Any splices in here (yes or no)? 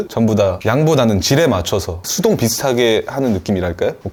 no